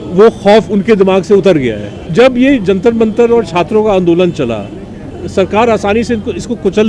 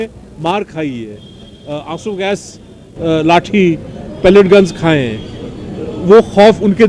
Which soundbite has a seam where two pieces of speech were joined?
first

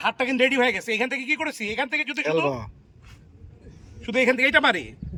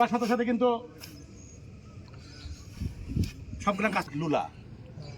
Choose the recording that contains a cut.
second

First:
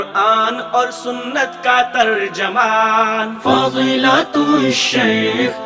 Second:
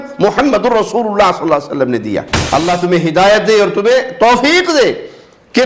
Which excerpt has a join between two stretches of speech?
second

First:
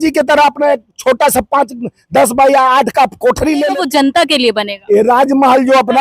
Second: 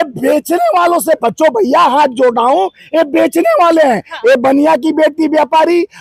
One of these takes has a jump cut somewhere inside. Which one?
first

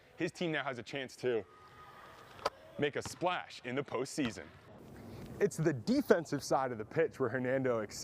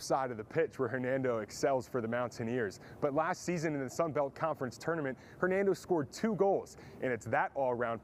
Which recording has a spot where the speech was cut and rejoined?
first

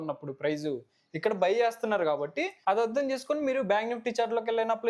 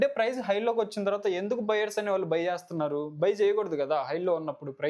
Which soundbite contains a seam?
first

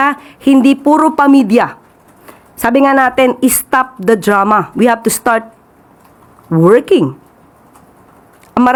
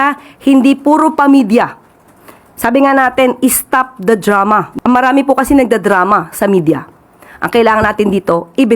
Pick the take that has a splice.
second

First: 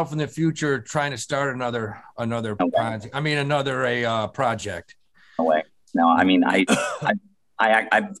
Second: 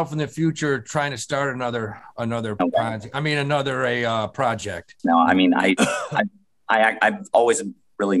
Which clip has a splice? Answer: second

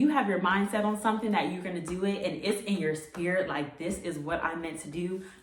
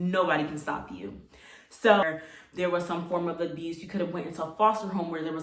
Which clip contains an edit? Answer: second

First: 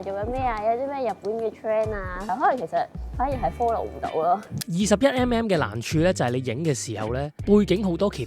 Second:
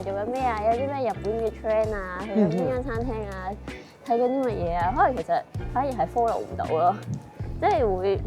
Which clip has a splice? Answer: first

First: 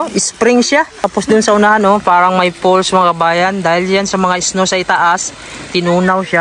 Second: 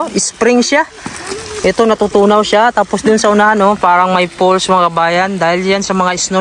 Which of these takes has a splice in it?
first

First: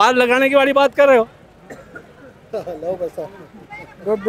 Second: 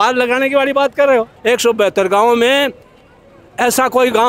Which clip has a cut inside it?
second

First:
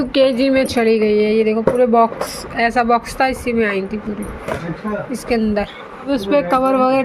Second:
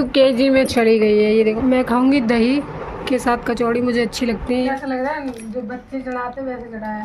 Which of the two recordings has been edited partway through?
second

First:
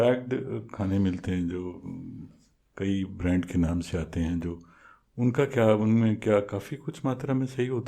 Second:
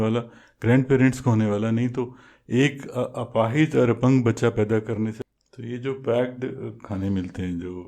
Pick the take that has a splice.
second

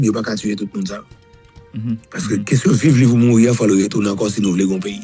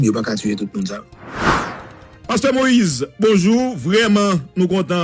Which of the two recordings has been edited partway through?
second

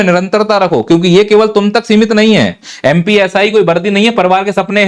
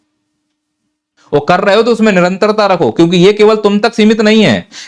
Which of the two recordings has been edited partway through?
second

